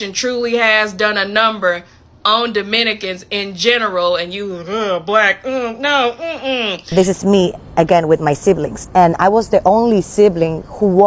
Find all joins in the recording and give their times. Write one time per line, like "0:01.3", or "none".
0:06.8